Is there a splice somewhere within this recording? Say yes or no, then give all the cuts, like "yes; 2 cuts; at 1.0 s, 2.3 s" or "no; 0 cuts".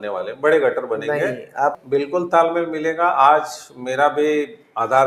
yes; 1 cut; at 1.8 s